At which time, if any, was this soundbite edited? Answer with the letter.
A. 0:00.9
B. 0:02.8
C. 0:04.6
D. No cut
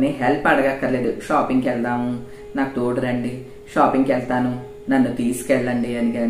D